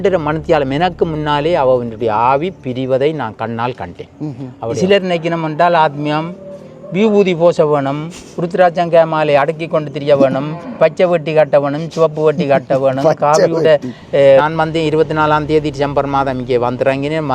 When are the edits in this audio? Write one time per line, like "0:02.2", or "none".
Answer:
0:04.8
0:14.4